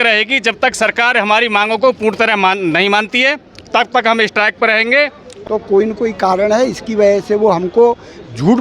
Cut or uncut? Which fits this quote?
cut